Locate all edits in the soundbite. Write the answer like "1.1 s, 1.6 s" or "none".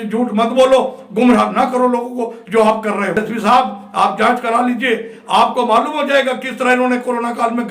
3.2 s